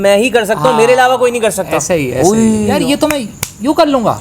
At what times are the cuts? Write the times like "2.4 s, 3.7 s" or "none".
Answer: 2.7 s